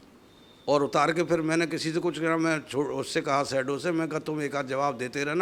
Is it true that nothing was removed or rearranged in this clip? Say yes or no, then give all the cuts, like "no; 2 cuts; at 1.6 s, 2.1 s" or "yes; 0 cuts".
yes; 0 cuts